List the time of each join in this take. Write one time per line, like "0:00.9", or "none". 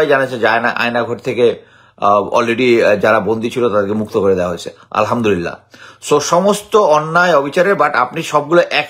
none